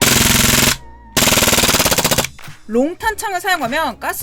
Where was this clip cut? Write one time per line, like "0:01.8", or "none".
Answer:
none